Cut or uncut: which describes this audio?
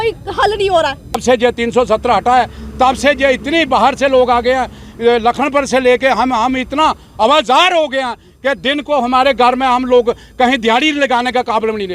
cut